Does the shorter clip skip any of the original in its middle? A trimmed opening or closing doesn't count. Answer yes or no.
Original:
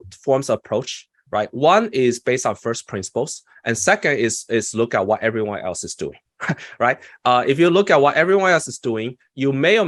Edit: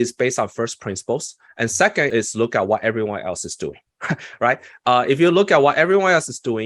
yes